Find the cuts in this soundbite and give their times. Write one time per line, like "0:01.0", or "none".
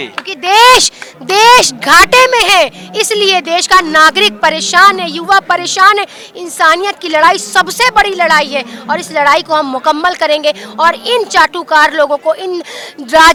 none

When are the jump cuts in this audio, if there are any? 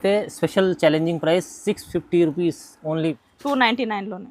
0:03.0

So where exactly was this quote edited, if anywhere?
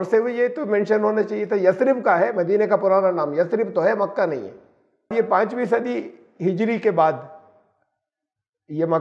0:05.1

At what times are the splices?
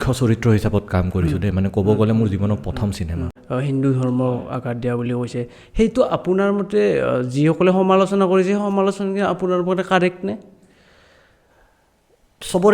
0:03.4

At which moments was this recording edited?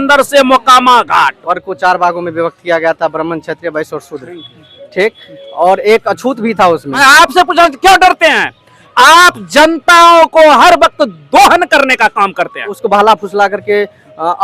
0:01.5
0:07.0
0:12.8

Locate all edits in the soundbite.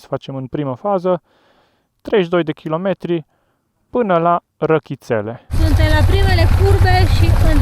0:05.5

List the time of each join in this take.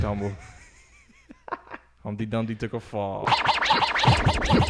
0:03.2

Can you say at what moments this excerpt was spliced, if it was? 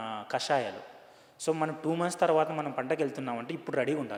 none

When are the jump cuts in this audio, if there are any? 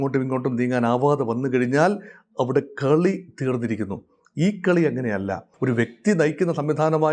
0:05.5

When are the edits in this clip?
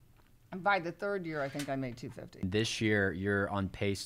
0:02.4

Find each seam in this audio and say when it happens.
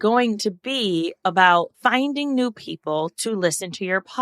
0:01.7

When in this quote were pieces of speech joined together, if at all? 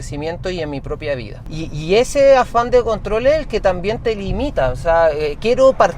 0:01.4

